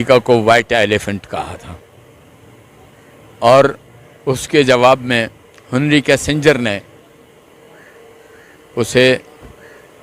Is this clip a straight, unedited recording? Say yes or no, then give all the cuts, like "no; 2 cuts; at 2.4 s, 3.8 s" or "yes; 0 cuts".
yes; 0 cuts